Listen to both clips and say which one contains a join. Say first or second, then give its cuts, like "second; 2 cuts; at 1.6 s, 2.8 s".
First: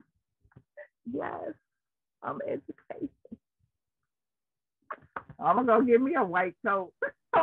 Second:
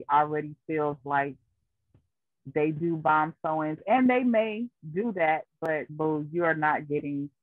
second; 1 cut; at 5.7 s